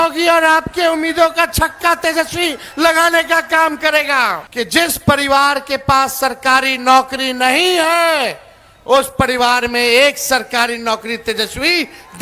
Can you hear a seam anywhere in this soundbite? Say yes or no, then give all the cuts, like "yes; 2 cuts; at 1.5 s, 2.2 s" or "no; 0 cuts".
yes; 1 cut; at 4.4 s